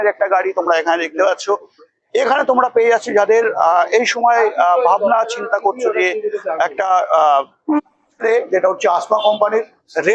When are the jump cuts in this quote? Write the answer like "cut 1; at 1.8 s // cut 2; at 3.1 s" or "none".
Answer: cut 1; at 8.2 s